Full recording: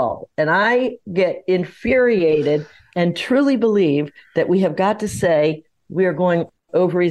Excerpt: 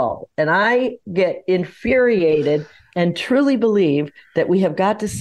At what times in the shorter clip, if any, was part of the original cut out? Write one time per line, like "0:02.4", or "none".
none